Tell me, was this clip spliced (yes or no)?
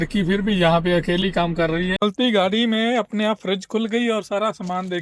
yes